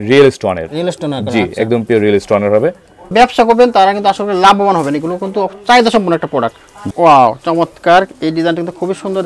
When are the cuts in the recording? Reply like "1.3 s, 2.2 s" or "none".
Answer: 3.1 s, 6.9 s